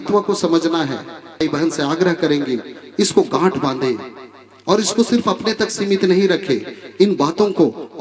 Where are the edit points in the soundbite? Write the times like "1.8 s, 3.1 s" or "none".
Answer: 1.3 s

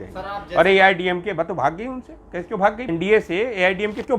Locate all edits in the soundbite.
2.9 s

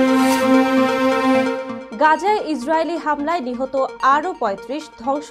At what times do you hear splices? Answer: 1.7 s

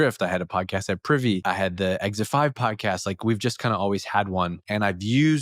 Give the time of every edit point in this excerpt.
1.4 s, 4.6 s

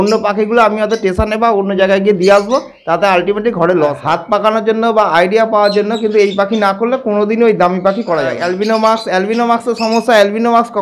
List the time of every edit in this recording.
4.0 s, 8.4 s

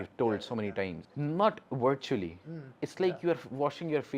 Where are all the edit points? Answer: 1.0 s

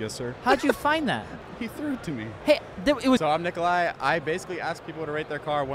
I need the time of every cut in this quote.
1.8 s, 3.2 s

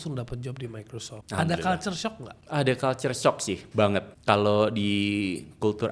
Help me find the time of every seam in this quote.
1.1 s, 2.3 s, 4.1 s

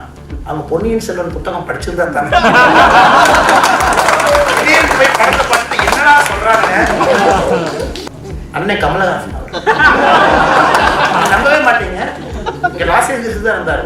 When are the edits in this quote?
8.0 s

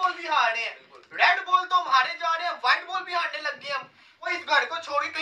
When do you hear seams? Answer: 4.3 s

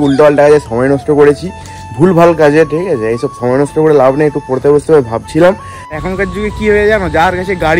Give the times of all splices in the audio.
5.9 s

